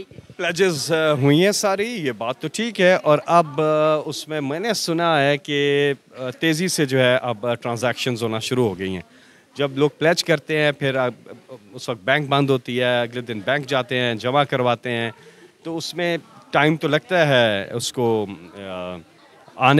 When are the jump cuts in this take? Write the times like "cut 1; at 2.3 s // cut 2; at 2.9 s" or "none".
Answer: none